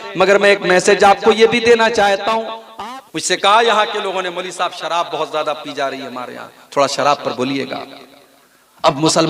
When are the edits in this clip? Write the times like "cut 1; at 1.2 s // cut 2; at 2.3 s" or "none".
cut 1; at 2.6 s